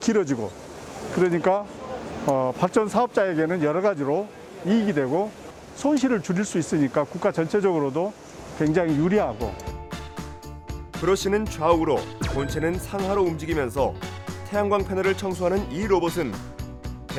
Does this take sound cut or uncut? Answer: uncut